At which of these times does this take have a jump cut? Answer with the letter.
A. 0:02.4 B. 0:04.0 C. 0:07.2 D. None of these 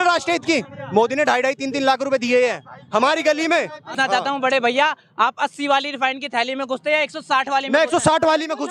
B